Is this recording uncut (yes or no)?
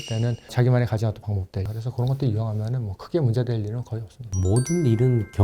no